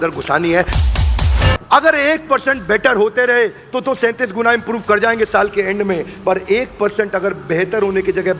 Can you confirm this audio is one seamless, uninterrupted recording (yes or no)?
no